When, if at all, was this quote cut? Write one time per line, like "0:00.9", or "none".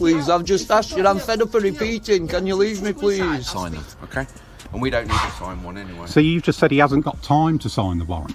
0:03.5